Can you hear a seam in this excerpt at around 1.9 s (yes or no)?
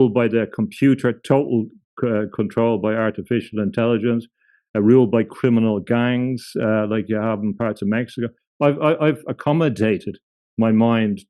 no